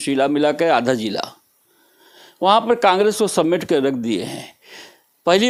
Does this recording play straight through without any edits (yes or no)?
yes